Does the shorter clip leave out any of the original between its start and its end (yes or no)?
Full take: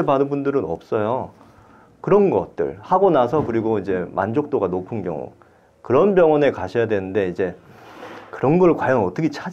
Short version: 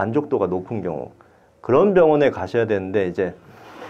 no